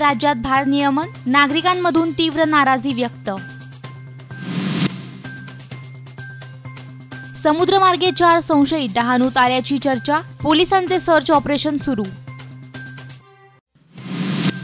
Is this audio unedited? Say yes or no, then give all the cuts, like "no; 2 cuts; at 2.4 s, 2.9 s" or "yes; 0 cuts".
yes; 0 cuts